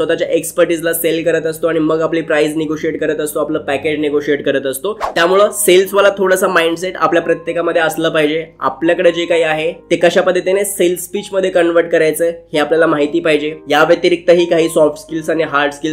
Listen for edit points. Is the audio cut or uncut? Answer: uncut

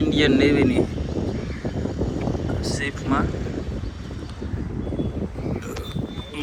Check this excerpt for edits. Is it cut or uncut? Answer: uncut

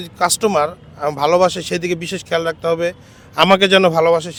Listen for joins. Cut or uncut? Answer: uncut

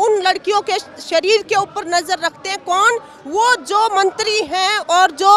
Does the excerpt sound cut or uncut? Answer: uncut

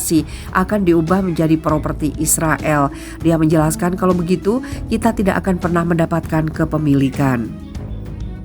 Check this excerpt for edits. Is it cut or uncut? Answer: cut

